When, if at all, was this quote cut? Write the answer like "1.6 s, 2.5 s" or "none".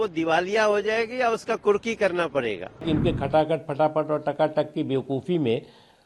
2.8 s